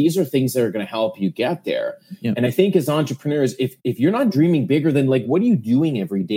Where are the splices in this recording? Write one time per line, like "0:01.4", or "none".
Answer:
none